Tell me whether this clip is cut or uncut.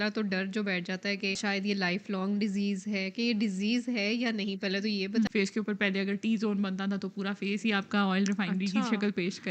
cut